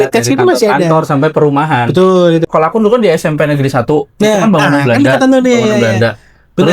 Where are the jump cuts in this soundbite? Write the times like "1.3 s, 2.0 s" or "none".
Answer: 2.5 s